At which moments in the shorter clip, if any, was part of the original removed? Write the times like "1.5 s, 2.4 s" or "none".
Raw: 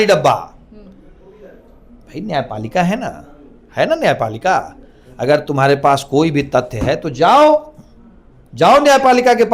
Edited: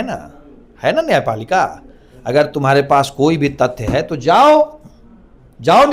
none